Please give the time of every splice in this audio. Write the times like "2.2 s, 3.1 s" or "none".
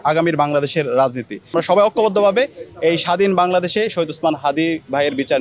1.5 s